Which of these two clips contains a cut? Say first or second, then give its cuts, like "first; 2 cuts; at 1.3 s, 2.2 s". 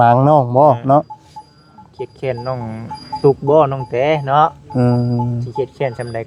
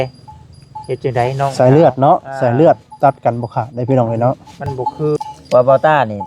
second; 1 cut; at 5.2 s